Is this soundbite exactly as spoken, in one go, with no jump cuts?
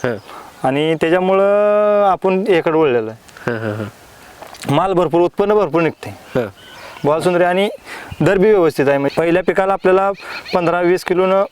no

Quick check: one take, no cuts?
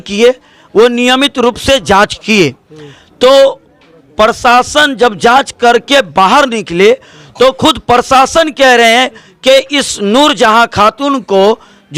yes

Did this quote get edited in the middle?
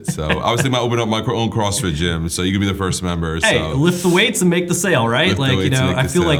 no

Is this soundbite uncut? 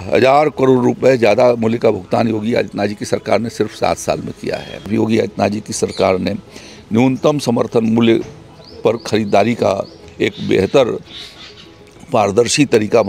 no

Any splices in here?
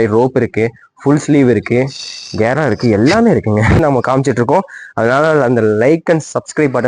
yes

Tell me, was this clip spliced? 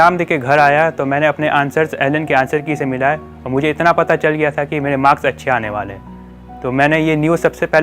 no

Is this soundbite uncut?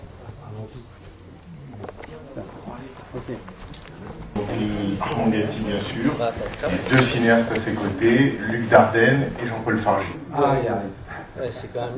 yes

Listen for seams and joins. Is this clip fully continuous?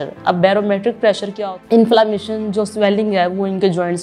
no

